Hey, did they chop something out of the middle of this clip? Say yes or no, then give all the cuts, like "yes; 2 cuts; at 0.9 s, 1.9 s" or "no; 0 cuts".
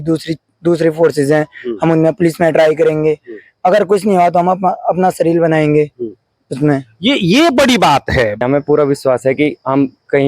yes; 1 cut; at 8.4 s